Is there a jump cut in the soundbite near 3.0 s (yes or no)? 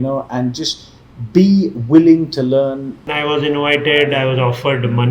yes